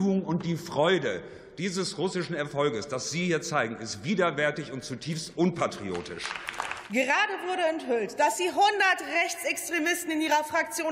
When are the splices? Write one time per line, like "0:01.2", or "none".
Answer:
0:06.7